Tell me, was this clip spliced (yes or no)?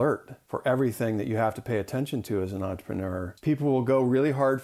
yes